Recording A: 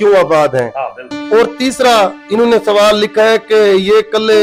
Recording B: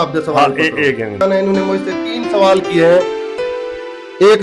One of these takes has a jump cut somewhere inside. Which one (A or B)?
B